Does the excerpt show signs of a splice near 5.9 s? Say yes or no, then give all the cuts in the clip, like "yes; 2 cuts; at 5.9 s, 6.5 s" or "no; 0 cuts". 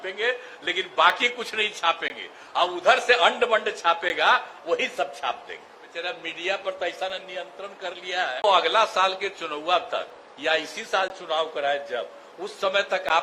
yes; 2 cuts; at 5.9 s, 8.4 s